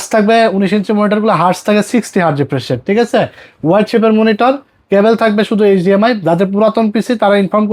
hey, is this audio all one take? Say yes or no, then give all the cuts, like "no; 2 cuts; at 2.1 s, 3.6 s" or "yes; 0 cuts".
yes; 0 cuts